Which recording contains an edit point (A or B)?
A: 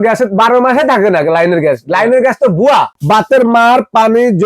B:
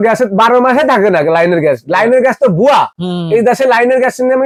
A